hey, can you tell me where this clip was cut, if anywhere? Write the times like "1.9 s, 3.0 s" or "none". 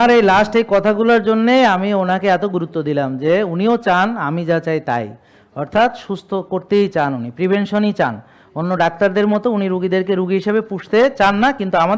none